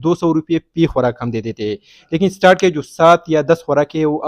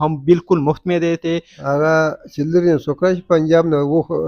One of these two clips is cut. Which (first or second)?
second